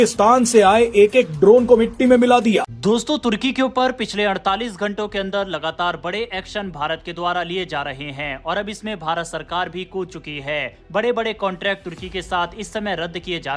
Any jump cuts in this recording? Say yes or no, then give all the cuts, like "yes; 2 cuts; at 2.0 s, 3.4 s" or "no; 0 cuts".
yes; 1 cut; at 2.7 s